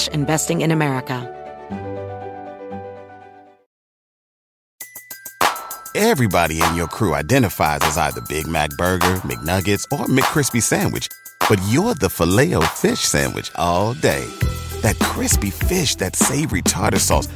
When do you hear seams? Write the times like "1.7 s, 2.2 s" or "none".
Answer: 1.2 s

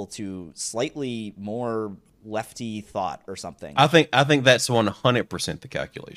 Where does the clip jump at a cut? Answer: 2.1 s, 3.7 s

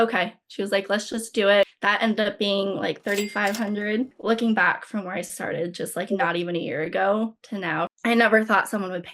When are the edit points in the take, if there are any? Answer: 1.7 s, 4.1 s, 7.9 s

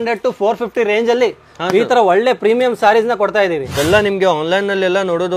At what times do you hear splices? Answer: 3.7 s

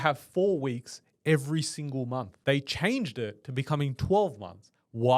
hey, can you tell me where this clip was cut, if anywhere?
2.3 s

